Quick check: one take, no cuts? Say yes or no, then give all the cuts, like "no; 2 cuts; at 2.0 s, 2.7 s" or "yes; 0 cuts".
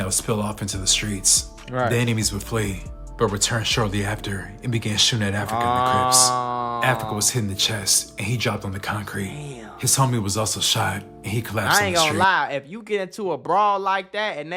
yes; 0 cuts